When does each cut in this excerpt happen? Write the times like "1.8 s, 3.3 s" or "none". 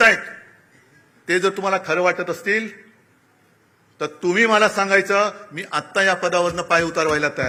none